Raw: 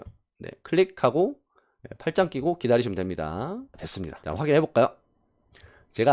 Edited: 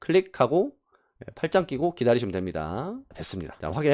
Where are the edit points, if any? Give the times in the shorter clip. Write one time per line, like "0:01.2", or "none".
none

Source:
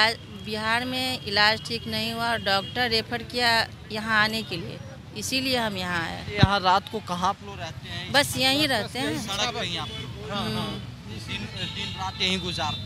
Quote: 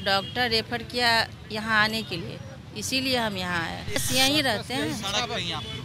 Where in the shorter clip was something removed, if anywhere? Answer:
0:04.0

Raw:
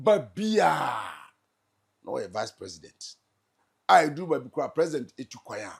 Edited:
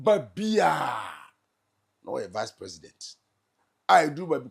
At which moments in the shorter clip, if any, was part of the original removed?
none

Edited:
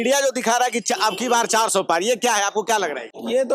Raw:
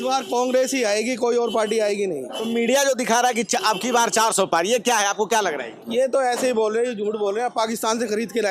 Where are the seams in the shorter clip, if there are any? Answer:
none

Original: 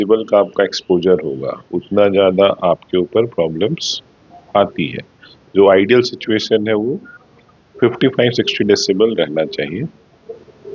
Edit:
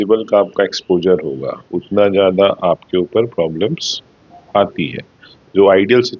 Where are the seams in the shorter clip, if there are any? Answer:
none

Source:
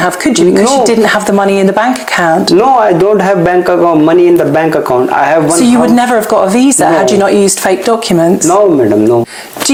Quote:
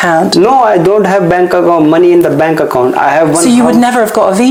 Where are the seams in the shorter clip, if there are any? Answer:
none

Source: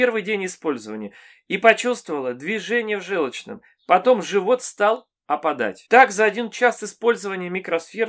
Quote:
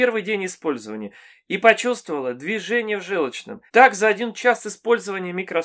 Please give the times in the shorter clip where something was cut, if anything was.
0:03.6

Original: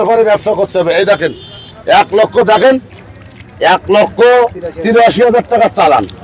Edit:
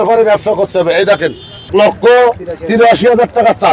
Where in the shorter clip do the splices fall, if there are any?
0:01.7

